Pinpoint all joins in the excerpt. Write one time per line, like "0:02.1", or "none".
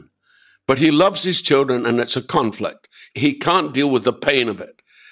0:03.3